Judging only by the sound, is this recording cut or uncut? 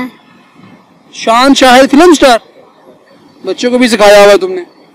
uncut